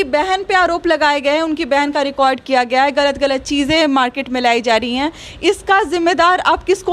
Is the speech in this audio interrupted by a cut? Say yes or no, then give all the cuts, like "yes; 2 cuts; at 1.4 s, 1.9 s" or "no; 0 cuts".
no; 0 cuts